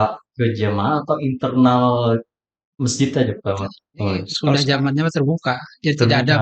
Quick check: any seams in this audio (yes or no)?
yes